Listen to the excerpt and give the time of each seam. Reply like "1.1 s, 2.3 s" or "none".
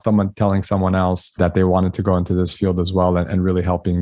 1.2 s